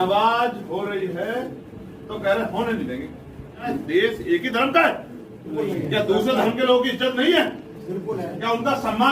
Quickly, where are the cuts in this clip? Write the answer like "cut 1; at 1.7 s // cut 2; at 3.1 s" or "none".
cut 1; at 3.7 s // cut 2; at 5.5 s